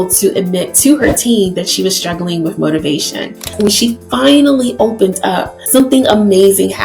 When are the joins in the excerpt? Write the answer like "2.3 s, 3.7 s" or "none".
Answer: 3.5 s, 5.8 s